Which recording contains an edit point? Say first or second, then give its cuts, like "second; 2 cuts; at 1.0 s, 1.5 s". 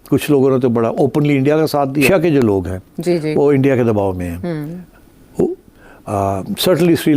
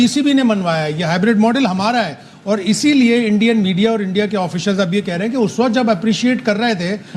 first; 1 cut; at 2.1 s